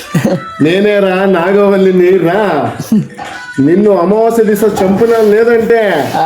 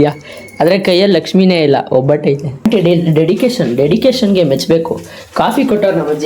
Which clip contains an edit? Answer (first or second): second